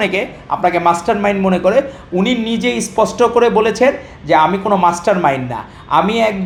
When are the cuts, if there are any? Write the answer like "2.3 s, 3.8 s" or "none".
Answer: none